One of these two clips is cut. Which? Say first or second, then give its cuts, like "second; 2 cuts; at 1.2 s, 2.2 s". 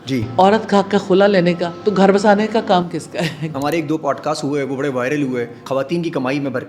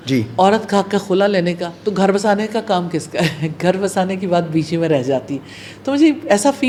first; 2 cuts; at 3.4 s, 5.6 s